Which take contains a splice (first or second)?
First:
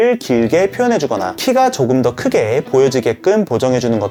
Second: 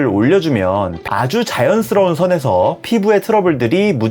second